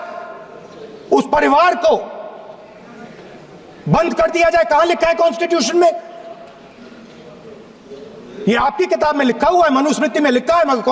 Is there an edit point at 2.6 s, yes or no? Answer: no